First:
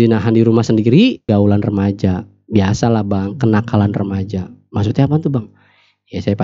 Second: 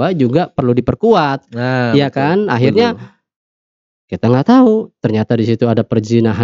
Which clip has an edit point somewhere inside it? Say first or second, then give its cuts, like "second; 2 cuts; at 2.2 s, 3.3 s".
first; 1 cut; at 1.2 s